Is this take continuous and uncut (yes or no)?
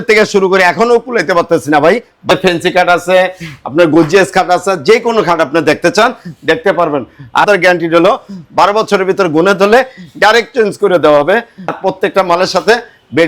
no